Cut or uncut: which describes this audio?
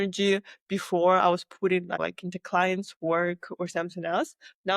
cut